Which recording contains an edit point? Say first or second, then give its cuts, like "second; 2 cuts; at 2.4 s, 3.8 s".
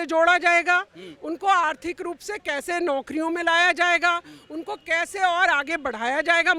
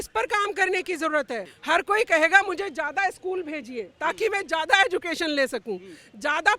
second; 1 cut; at 1.4 s